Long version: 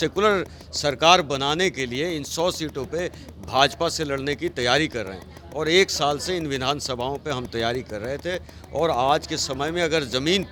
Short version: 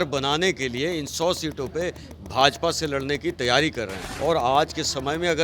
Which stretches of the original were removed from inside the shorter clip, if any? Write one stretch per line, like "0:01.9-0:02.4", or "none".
0:05.2-0:08.6